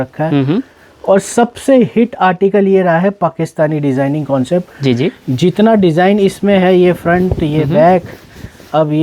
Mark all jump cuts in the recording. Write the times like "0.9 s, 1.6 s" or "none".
none